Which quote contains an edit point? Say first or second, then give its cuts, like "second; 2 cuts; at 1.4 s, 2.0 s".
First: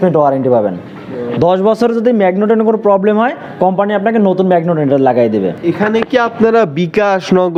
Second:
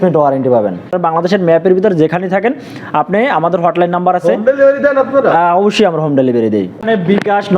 second; 2 cuts; at 0.9 s, 6.8 s